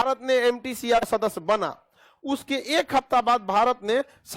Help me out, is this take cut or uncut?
cut